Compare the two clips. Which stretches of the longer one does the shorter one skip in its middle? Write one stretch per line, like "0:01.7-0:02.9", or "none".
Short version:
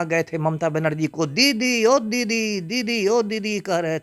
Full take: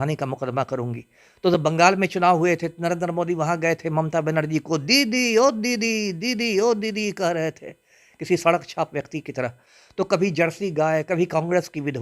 none